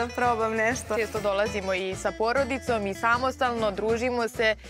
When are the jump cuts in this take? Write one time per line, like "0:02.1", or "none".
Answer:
0:00.9

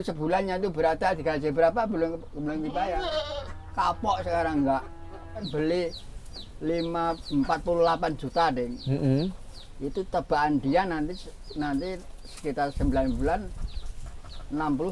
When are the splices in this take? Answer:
0:05.5

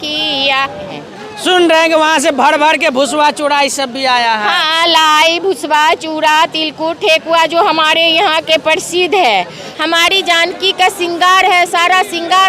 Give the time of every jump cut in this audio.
0:00.9
0:09.6

